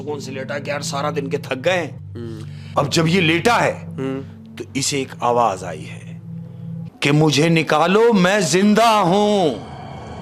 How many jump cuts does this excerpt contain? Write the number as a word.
two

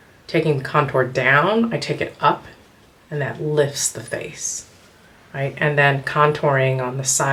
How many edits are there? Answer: zero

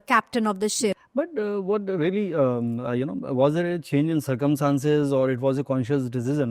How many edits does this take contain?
one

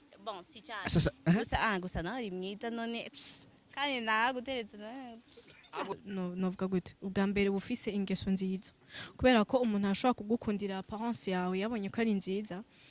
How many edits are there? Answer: one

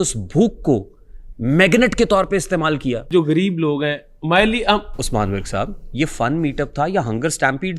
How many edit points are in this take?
one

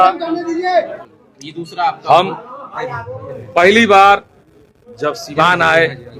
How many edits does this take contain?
zero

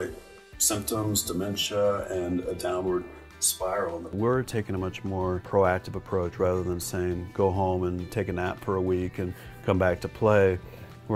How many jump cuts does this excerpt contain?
two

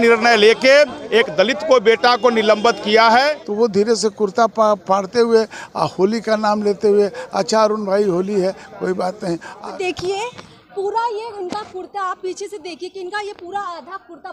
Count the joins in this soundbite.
two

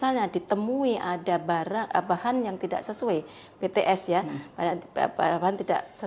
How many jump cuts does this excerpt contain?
zero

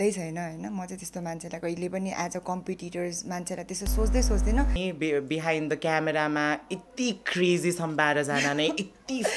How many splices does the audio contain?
one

